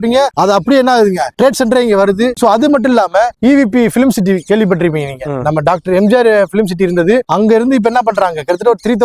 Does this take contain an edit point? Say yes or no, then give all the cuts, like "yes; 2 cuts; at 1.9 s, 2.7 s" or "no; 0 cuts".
no; 0 cuts